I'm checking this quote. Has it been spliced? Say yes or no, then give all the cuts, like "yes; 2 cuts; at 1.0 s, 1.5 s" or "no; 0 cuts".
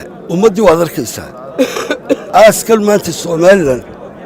yes; 1 cut; at 2.2 s